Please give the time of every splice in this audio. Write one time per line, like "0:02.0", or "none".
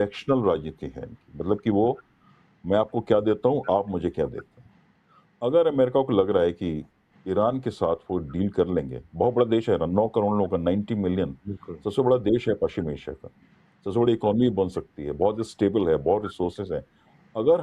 none